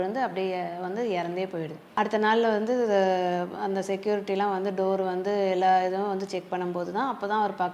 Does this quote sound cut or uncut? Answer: cut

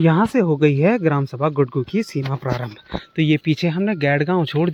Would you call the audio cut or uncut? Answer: uncut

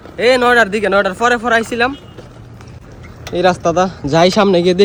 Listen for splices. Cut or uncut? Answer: uncut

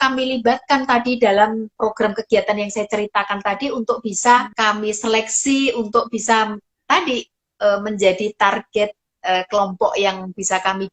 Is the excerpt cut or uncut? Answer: cut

